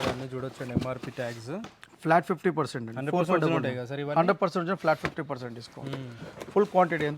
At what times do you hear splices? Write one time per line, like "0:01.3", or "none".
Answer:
none